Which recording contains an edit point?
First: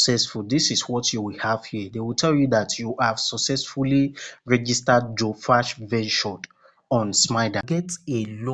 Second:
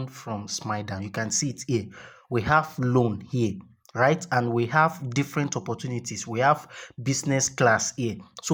first; 1 cut; at 7.6 s

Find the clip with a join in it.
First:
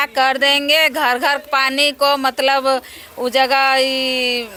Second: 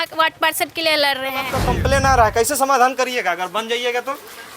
second; 1 cut; at 1.6 s

